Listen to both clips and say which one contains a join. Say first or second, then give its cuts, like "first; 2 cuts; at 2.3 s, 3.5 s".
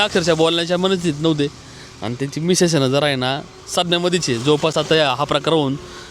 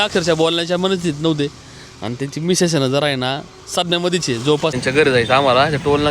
second; 1 cut; at 4.7 s